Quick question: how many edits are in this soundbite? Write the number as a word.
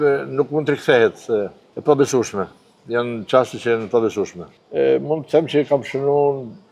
two